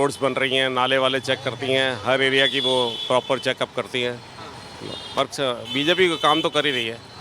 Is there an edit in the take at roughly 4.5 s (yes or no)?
no